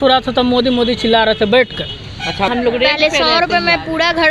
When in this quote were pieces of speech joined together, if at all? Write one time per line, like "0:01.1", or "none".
0:02.5